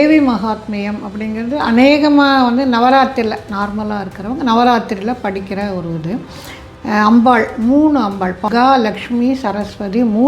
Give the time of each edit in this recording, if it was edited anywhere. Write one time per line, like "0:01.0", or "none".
0:08.4